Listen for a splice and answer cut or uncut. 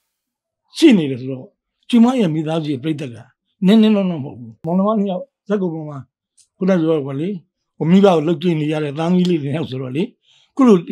cut